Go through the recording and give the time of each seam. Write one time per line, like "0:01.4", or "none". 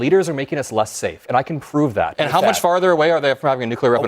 0:02.1